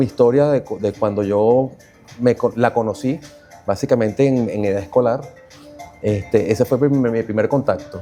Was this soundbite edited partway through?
no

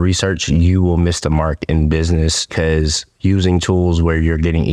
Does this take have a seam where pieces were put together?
yes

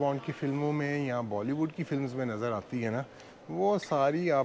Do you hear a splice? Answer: no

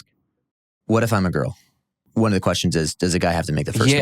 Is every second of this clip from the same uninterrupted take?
no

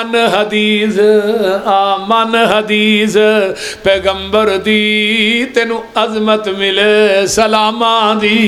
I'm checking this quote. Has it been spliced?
no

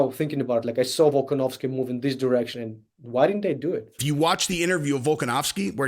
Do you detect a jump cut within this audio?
yes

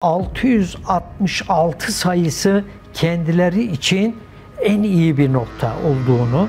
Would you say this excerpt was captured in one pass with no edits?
yes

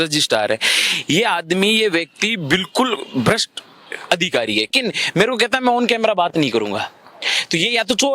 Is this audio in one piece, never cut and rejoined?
no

